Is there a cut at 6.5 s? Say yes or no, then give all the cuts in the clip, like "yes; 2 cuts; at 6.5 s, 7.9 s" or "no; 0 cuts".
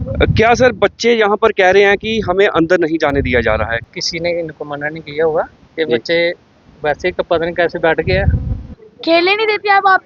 no; 2 cuts; at 3.9 s, 8.7 s